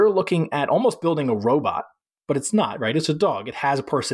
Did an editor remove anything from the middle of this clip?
no; 0 cuts

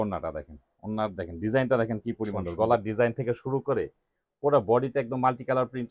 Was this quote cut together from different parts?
yes; 1 cut; at 2.4 s

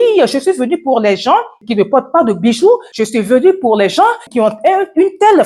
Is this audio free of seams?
no; 3 cuts; at 1.6 s, 2.9 s, 4.2 s

